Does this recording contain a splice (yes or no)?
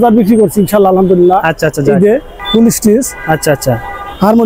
yes